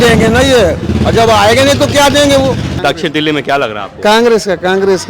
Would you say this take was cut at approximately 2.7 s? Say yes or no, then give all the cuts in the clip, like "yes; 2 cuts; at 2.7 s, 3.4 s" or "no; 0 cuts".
yes; 1 cut; at 2.7 s